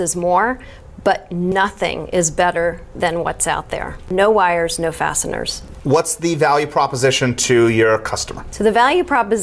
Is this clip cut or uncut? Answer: uncut